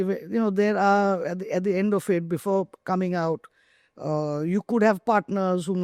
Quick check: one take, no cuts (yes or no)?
yes